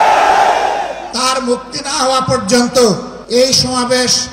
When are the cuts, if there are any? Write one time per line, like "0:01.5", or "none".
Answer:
0:01.0
0:03.1